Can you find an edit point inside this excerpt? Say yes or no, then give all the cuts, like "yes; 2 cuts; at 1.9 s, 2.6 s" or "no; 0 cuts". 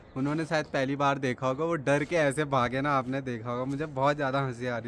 no; 0 cuts